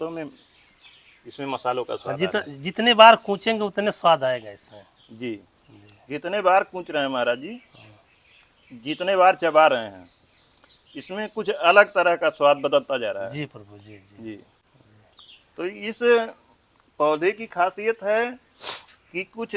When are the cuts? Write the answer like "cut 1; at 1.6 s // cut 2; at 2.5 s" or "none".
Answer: none

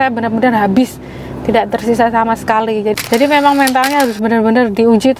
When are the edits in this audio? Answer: cut 1; at 2.9 s

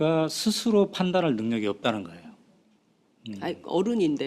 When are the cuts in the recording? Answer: cut 1; at 2.9 s

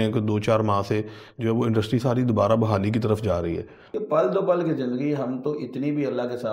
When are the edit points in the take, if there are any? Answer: cut 1; at 3.8 s

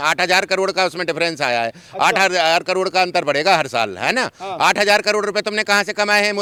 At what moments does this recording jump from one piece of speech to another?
none

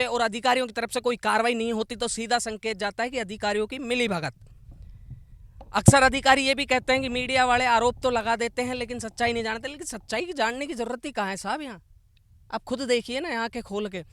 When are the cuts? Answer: none

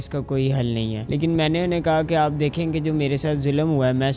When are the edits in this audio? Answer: cut 1; at 1.0 s

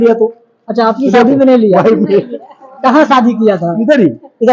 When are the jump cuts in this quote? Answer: none

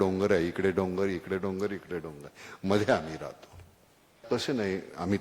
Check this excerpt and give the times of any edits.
cut 1; at 4.2 s

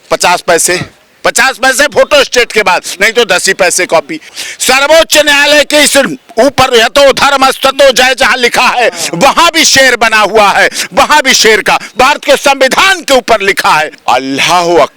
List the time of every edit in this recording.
cut 1; at 4.4 s // cut 2; at 13.9 s

